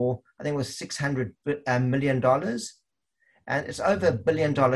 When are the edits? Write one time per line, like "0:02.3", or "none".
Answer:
none